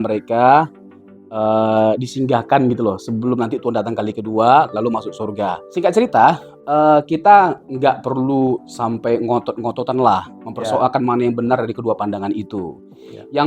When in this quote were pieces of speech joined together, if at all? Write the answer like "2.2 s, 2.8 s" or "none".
5.6 s